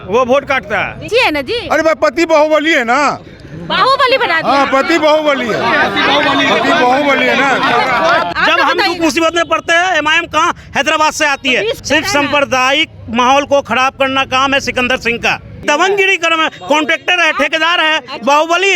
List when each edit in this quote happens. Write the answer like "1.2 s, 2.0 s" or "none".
1.1 s, 8.3 s, 11.8 s, 15.6 s

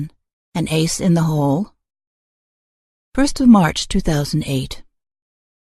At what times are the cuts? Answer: none

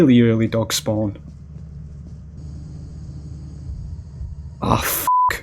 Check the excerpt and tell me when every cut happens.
2.4 s

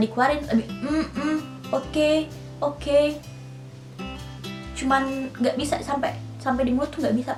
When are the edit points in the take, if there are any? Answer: none

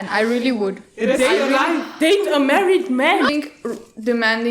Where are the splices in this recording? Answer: 3.3 s

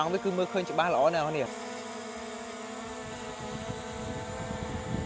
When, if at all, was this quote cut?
1.5 s

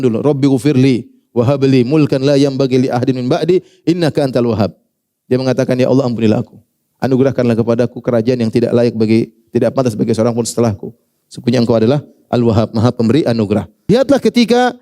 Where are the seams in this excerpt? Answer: 13.9 s

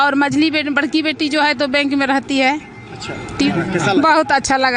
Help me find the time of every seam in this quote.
3.5 s

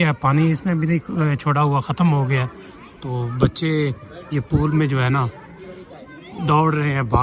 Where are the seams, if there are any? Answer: none

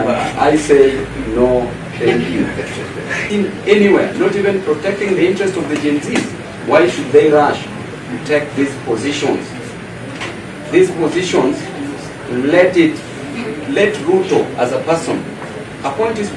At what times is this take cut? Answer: 3.3 s

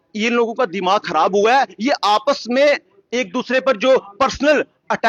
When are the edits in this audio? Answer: none

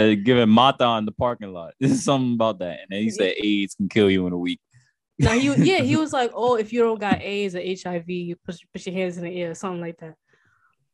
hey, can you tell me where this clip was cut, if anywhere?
none

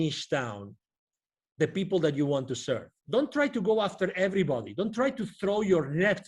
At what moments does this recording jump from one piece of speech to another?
2.9 s

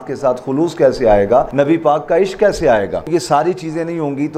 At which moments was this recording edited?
1.5 s, 3.1 s

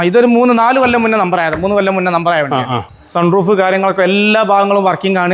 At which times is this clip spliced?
2.9 s

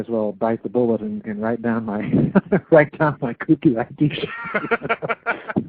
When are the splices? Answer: 3.8 s

